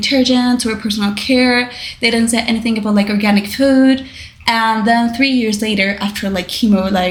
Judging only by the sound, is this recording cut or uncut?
uncut